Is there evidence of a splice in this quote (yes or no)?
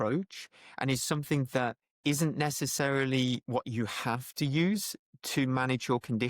yes